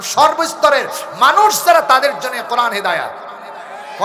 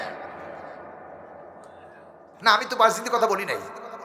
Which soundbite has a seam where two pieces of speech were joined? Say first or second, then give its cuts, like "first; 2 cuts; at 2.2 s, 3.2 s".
second; 1 cut; at 2.3 s